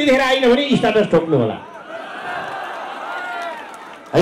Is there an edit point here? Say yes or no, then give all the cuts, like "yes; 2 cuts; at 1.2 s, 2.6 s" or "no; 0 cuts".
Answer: no; 0 cuts